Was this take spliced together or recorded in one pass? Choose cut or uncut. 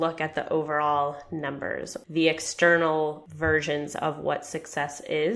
cut